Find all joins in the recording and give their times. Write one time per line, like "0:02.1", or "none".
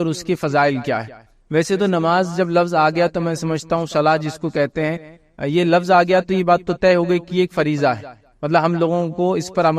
none